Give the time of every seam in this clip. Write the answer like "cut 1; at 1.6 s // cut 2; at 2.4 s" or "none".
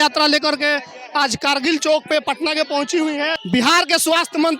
cut 1; at 3.4 s